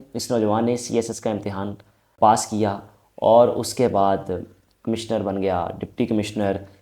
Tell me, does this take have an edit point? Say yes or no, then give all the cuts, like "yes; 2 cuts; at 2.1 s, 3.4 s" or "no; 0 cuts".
yes; 1 cut; at 2.1 s